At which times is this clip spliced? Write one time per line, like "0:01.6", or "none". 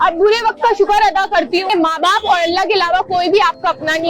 0:01.7